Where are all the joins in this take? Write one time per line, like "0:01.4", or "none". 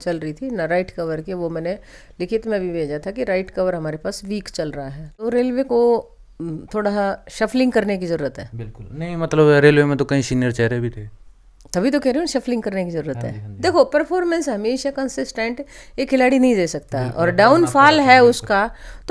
0:05.0